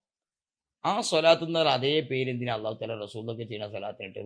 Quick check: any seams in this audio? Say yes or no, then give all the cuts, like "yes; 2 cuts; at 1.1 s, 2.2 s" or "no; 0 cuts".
no; 0 cuts